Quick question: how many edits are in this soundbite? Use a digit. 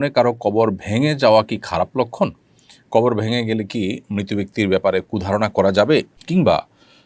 1